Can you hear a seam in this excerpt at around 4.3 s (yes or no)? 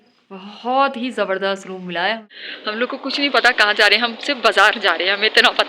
no